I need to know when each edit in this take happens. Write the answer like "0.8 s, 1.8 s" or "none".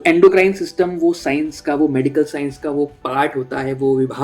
none